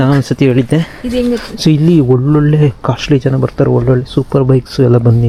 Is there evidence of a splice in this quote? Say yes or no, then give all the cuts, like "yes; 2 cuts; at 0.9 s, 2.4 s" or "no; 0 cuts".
no; 0 cuts